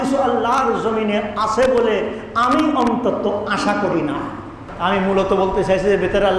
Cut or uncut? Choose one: cut